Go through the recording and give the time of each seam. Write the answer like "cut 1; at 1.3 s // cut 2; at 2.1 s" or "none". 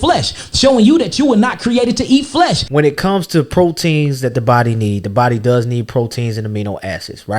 cut 1; at 2.6 s

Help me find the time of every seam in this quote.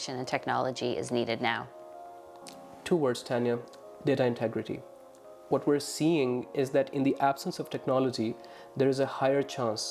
none

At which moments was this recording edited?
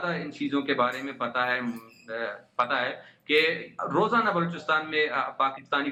none

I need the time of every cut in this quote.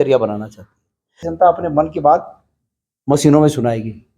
cut 1; at 1.2 s

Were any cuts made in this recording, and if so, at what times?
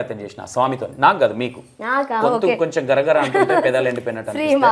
none

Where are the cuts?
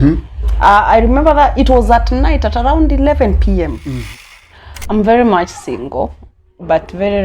cut 1; at 4.0 s

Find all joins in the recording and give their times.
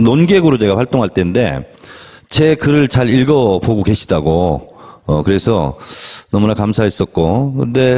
none

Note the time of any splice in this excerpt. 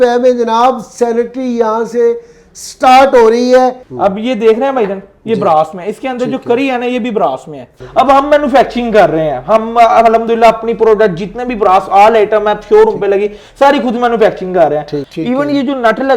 cut 1; at 3.9 s // cut 2; at 7.8 s // cut 3; at 15.0 s

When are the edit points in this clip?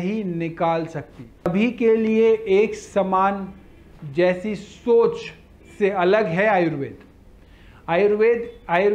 cut 1; at 1.5 s

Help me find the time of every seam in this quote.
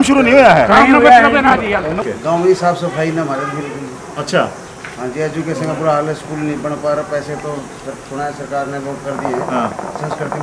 cut 1; at 2.0 s

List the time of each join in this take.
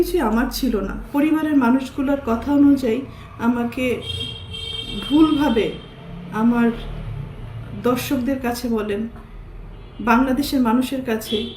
cut 1; at 1.0 s

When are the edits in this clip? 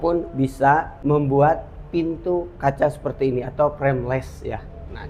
cut 1; at 0.9 s

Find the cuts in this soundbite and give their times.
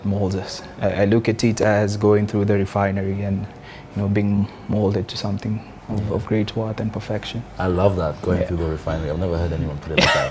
none

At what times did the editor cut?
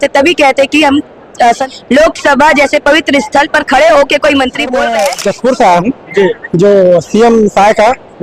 cut 1; at 1.6 s // cut 2; at 4.8 s

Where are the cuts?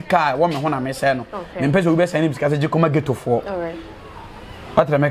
none

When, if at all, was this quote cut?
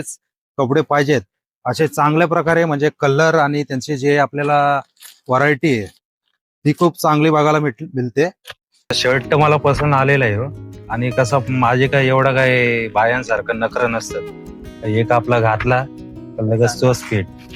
cut 1; at 9.0 s

